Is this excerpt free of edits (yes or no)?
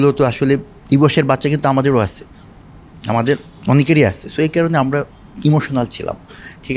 yes